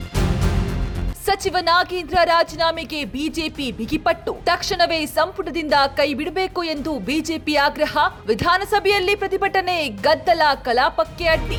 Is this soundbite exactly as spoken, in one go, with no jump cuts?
yes; 0 cuts

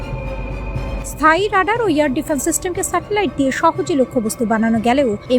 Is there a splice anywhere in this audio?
yes; 1 cut; at 1.0 s

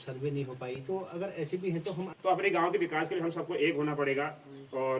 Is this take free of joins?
no; 1 cut; at 2.1 s

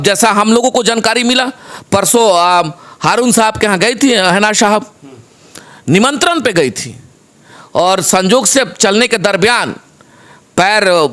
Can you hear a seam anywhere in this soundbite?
no; 0 cuts

